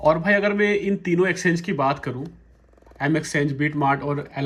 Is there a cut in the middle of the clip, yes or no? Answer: no